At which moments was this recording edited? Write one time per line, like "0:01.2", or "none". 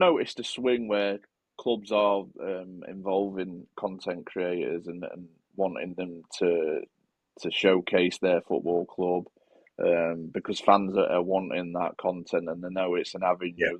none